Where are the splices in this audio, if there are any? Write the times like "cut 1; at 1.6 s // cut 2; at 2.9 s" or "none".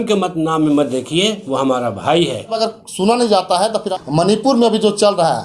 cut 1; at 2.6 s // cut 2; at 3.9 s